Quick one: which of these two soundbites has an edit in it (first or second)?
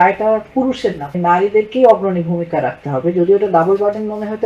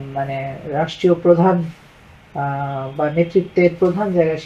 first